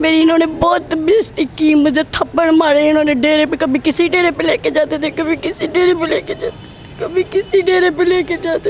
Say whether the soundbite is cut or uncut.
uncut